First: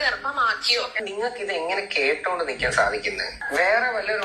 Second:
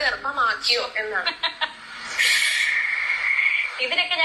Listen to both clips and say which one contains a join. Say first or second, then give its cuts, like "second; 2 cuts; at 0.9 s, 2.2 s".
first; 2 cuts; at 1.0 s, 3.3 s